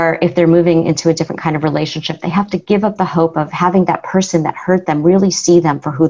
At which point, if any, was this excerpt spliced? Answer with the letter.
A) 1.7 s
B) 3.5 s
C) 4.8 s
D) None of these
B